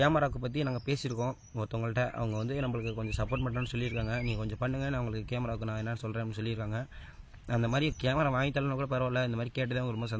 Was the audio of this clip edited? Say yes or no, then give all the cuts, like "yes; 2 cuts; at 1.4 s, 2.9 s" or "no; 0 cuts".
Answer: no; 0 cuts